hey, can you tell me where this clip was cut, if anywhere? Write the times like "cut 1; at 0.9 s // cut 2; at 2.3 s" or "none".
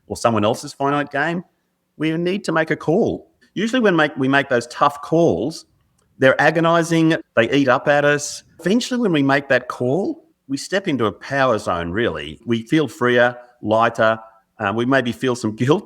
cut 1; at 3.4 s // cut 2; at 7.2 s // cut 3; at 8.6 s // cut 4; at 10.3 s // cut 5; at 12.4 s